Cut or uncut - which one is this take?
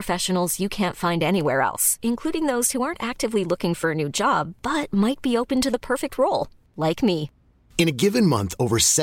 uncut